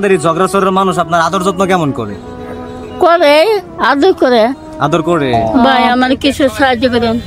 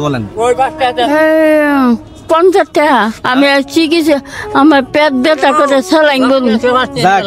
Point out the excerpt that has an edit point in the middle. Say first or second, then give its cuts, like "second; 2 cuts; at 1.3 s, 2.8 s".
first; 1 cut; at 5.4 s